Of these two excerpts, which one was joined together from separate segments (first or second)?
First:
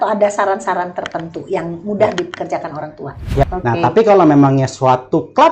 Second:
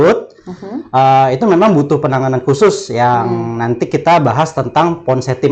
first